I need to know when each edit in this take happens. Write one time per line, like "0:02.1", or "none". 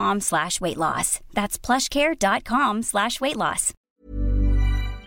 0:03.7